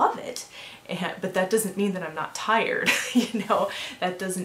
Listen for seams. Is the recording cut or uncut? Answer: uncut